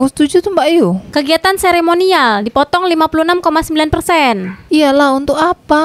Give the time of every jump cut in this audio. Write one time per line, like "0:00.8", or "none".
none